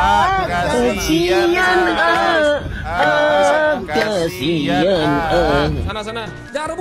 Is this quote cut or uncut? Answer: uncut